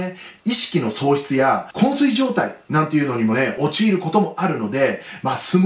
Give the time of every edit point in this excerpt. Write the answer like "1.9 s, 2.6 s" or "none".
1.7 s